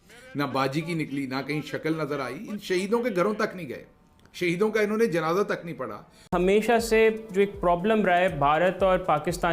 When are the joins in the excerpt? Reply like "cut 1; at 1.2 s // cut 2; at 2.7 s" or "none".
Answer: cut 1; at 6.3 s